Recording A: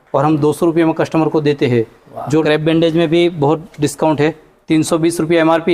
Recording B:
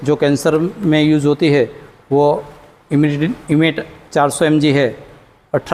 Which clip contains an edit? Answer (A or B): A